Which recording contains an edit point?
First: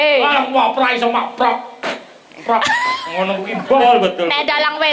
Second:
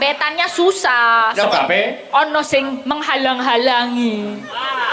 first; 1 cut; at 3.8 s

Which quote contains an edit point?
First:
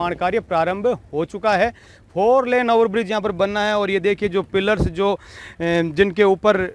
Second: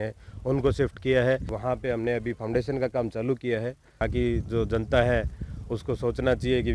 second; 2 cuts; at 1.5 s, 4.0 s

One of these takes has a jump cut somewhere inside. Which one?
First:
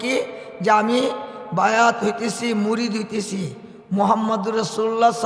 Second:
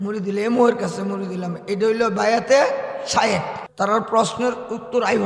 second; 1 cut; at 3.6 s

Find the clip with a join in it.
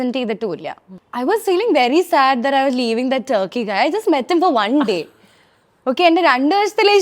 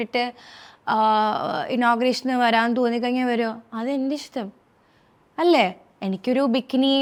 first; 1 cut; at 1.0 s

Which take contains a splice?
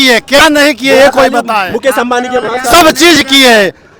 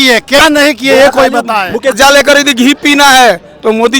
second; 1 cut; at 1.9 s

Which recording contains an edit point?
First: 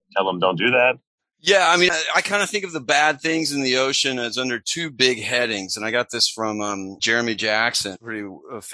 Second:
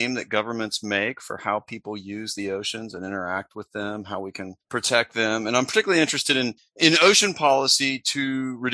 first; 1 cut; at 1.9 s

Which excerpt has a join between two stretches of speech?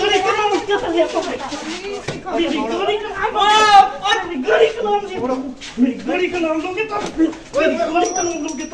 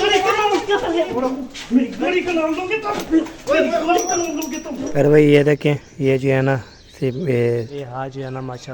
second; 3 cuts; at 1.1 s, 4.8 s, 7.8 s

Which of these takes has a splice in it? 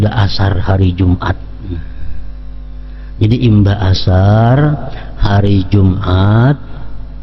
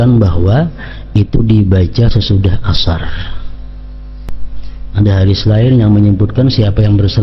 second; 1 cut; at 4.3 s

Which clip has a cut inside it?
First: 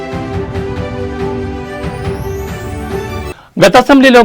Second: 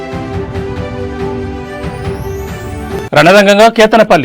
second; 1 cut; at 3.0 s

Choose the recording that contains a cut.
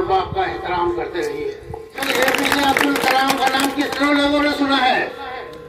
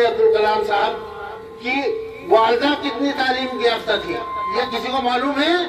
first; 1 cut; at 2.0 s

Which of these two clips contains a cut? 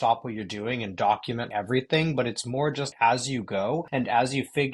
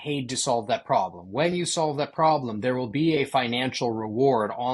first; 3 cuts; at 1.5 s, 2.9 s, 3.9 s

